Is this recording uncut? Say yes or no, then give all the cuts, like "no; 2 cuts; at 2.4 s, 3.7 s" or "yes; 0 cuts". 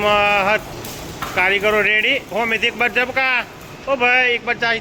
yes; 0 cuts